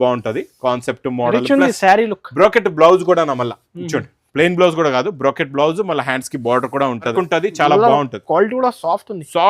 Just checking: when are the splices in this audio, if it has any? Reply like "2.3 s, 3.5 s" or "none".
7.1 s